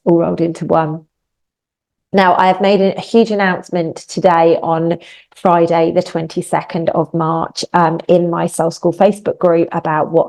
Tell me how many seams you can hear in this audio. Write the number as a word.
zero